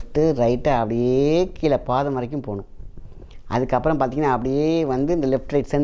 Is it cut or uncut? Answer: uncut